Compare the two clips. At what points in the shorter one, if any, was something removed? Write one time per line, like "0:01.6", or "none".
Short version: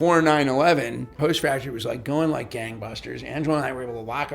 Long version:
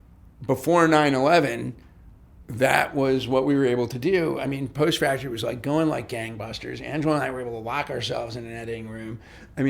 0:01.1